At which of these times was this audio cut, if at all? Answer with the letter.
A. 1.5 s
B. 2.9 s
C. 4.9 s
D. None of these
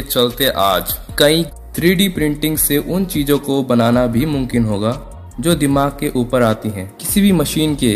A